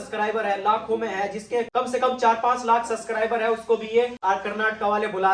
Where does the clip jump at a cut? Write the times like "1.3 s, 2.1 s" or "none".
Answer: none